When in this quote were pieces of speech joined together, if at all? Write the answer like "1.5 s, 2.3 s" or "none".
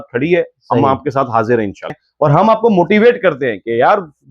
1.9 s